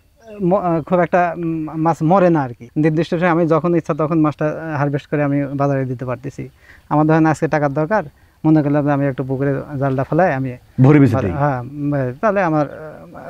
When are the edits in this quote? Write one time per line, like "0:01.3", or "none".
0:02.6